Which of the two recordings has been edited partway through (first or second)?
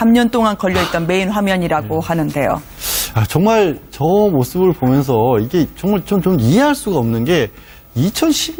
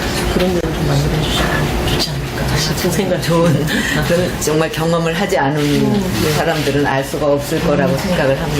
second